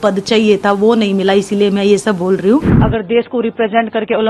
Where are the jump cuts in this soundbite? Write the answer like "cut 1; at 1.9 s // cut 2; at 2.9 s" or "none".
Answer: cut 1; at 2.8 s

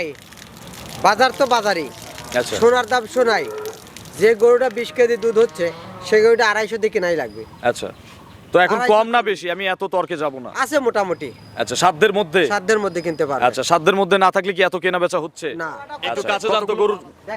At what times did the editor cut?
cut 1; at 16.1 s

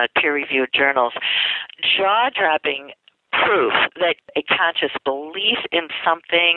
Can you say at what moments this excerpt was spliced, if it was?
cut 1; at 4.3 s

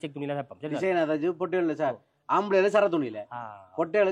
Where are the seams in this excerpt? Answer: none

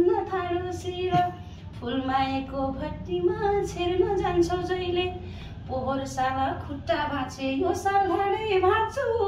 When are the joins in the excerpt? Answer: none

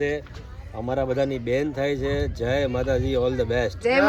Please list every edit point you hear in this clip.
none

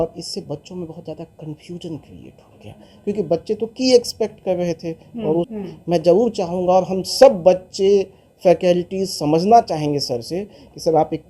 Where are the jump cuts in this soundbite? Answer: cut 1; at 5.5 s

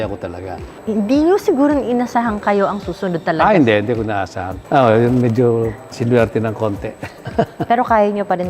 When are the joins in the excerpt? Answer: cut 1; at 4.5 s // cut 2; at 7.2 s

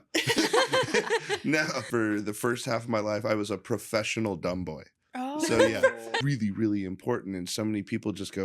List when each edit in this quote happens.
cut 1; at 1.8 s // cut 2; at 6.1 s

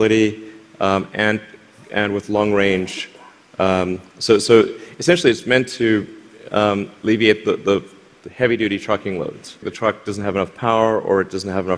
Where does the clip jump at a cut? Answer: cut 1; at 9.7 s

